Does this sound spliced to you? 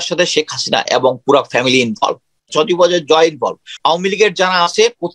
yes; 2 cuts; at 2.5 s, 3.7 s

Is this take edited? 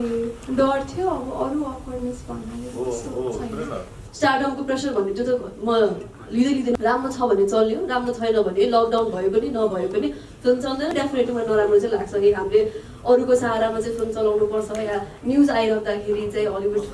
yes; 3 cuts; at 4.0 s, 6.8 s, 10.9 s

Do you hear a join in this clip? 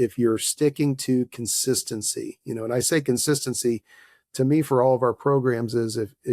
no; 0 cuts

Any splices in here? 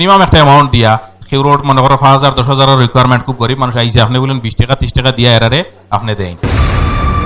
yes; 1 cut; at 6.4 s

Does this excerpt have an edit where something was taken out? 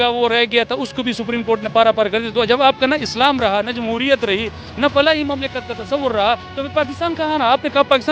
no; 0 cuts

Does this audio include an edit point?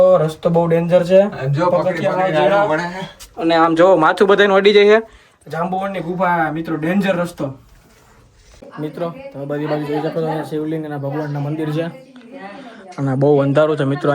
yes; 1 cut; at 8.7 s

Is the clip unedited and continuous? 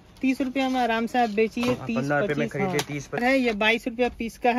no; 1 cut; at 3.2 s

